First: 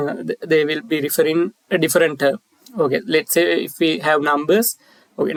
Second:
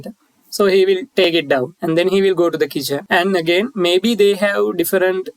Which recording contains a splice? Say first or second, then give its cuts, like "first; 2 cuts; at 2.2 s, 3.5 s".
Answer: second; 2 cuts; at 1.3 s, 3.0 s